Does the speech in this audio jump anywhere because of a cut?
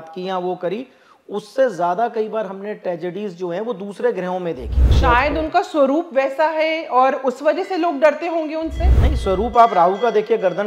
yes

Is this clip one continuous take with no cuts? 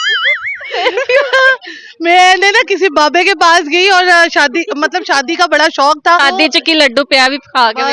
no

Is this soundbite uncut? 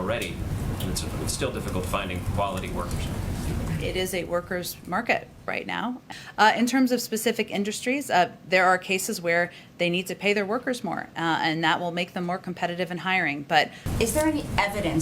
no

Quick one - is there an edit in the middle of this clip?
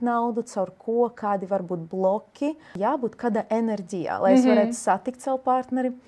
yes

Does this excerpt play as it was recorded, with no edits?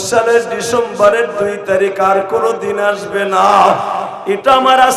yes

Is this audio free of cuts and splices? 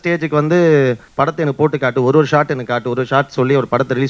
no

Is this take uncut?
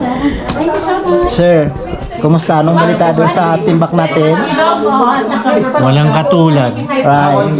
yes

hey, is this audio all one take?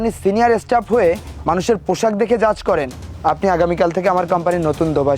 no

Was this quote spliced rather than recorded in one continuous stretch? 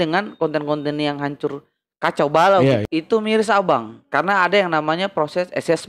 yes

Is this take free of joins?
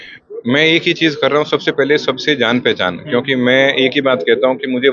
yes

